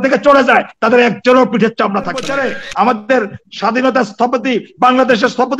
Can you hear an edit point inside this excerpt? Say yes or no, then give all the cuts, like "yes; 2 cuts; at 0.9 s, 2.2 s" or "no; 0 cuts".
yes; 1 cut; at 2.3 s